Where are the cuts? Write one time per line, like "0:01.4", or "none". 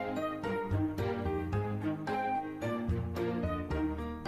none

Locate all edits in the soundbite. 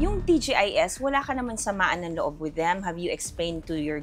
none

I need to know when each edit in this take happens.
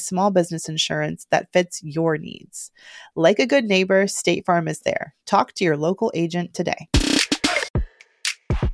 0:07.7

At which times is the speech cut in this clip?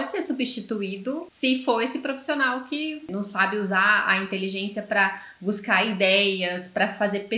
0:01.3
0:03.0

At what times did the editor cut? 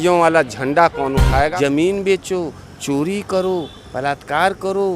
0:01.5

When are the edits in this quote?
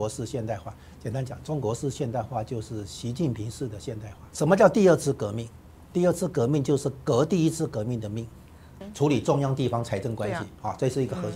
0:04.3
0:08.8

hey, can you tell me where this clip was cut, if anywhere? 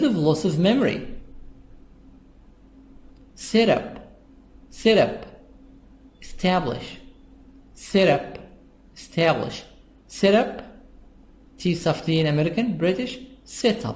none

